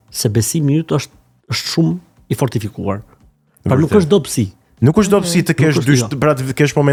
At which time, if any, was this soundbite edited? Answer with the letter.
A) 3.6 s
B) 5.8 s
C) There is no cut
C